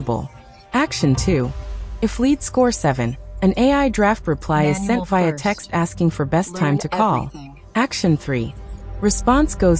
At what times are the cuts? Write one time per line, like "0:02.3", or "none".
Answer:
none